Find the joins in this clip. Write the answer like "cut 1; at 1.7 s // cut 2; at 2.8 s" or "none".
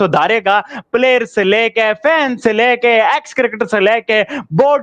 none